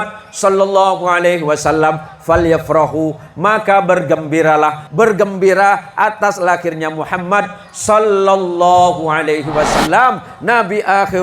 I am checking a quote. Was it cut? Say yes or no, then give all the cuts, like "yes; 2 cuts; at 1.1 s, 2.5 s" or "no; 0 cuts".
yes; 1 cut; at 4.8 s